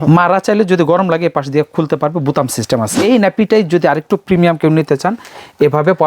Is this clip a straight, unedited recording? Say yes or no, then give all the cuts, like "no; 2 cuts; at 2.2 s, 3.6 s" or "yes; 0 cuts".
no; 1 cut; at 3.0 s